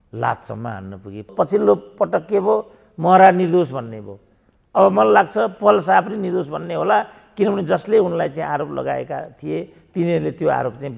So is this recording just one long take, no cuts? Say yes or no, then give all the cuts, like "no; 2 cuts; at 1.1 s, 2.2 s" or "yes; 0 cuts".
no; 1 cut; at 1.3 s